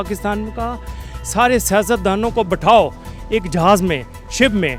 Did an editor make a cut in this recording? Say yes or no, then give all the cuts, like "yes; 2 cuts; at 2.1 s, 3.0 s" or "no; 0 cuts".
no; 0 cuts